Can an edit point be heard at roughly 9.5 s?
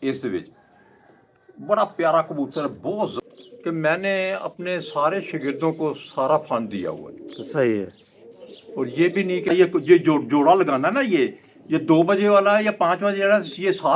yes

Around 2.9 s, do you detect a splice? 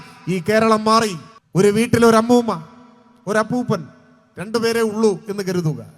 no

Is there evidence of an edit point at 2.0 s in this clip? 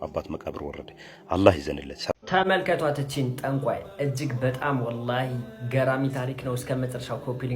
yes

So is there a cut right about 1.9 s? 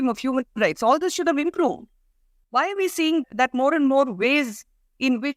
no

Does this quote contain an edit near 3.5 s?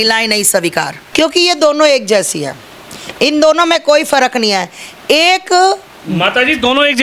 no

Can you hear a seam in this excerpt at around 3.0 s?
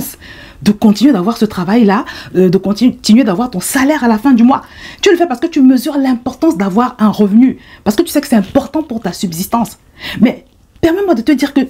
no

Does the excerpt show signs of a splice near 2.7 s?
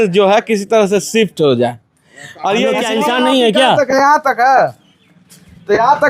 yes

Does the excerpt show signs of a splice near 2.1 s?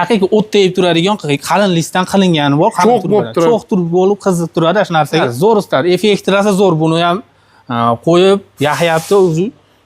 no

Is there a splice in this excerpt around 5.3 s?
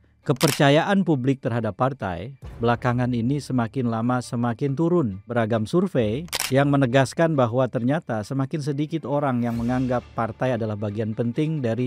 yes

